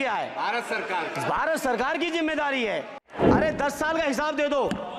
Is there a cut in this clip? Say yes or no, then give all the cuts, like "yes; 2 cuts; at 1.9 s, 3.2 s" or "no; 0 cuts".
yes; 1 cut; at 3.1 s